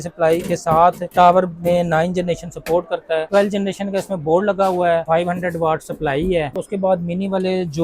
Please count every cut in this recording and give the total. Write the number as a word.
two